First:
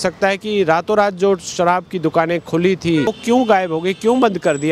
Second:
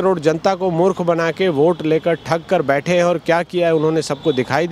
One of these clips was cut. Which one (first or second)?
first